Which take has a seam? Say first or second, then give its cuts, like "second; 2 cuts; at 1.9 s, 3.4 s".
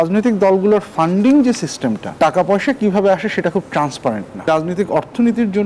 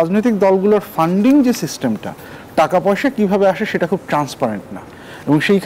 first; 2 cuts; at 2.1 s, 4.5 s